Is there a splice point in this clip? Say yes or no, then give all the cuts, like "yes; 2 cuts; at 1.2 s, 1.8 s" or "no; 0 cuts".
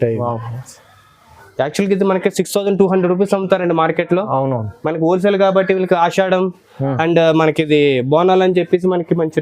yes; 1 cut; at 1.4 s